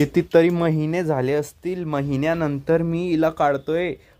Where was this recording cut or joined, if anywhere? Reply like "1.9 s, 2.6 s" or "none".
none